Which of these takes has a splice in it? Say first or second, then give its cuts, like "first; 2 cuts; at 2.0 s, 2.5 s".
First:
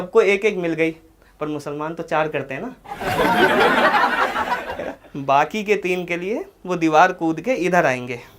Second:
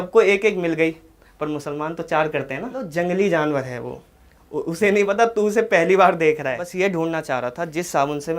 second; 2 cuts; at 2.8 s, 6.7 s